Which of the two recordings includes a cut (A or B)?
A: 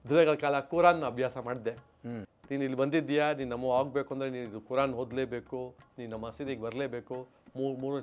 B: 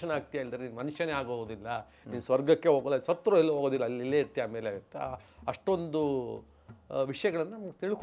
A